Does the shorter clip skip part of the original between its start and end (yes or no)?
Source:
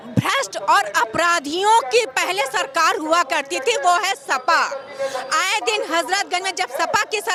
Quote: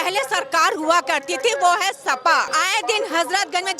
yes